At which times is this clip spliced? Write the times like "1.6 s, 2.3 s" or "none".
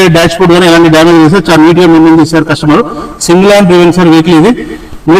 none